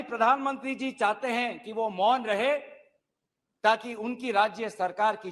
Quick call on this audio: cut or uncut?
uncut